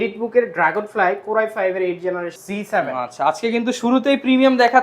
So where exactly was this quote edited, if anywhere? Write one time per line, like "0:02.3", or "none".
0:02.4